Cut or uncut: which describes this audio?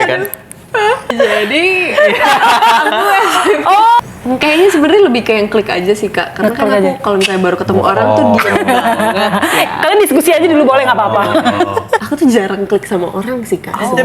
cut